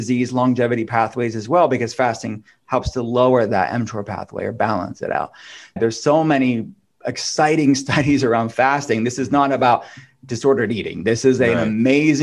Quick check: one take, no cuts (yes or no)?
no